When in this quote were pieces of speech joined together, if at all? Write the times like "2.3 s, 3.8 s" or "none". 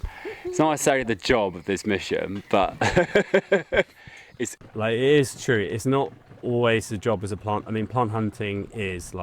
4.5 s